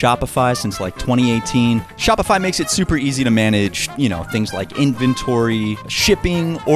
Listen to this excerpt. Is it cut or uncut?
cut